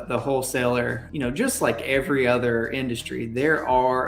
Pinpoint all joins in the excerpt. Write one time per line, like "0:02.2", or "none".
0:01.0